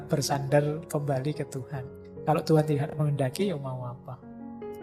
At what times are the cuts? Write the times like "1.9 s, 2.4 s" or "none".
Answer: none